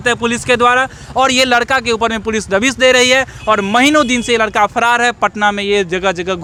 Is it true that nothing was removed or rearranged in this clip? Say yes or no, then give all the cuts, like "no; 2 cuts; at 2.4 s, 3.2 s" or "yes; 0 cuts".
yes; 0 cuts